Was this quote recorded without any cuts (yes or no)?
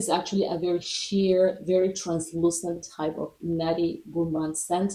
yes